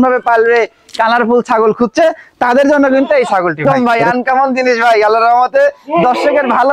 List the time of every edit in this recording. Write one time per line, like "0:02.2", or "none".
0:03.6